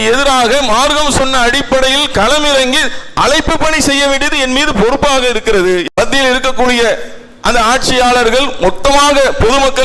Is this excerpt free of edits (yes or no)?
no